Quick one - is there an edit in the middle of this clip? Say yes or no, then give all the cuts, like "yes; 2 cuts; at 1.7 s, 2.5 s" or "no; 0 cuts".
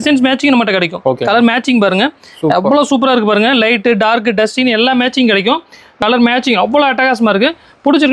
yes; 1 cut; at 6.0 s